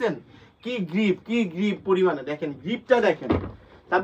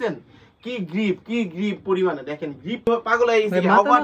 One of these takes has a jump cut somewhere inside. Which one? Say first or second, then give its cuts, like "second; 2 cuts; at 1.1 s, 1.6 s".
second; 1 cut; at 2.9 s